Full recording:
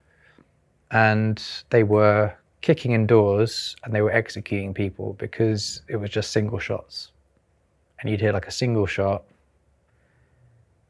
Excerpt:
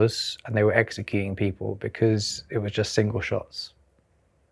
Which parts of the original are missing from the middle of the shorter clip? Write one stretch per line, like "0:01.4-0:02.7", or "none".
none